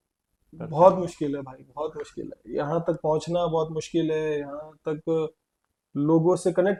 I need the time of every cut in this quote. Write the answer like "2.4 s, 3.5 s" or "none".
none

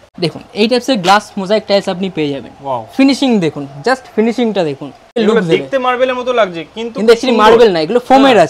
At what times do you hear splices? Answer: 5.2 s

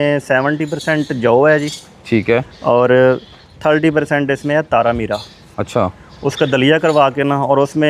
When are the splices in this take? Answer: none

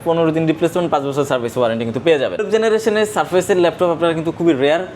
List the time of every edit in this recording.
2.4 s

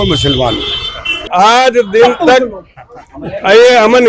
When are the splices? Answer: 1.2 s

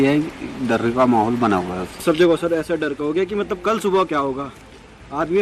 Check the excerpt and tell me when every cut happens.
2.0 s

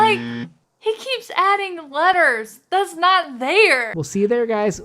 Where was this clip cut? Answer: 4.0 s

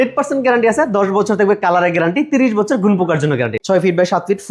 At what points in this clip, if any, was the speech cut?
3.6 s

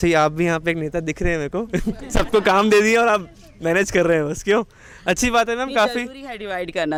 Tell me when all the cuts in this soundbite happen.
none

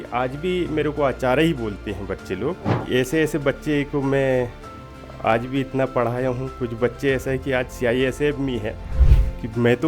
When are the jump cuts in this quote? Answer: 2.8 s, 9.0 s

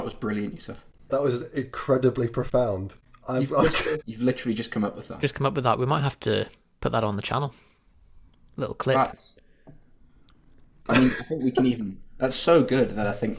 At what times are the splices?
1.1 s, 4.1 s

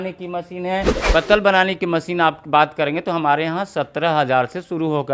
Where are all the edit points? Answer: 0.9 s

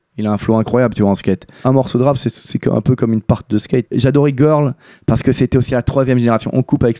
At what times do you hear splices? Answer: 1.6 s, 3.9 s, 5.7 s

